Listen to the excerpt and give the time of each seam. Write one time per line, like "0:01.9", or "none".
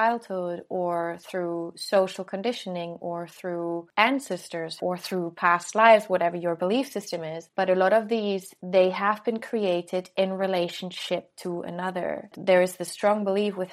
0:04.8
0:07.4
0:08.5
0:12.3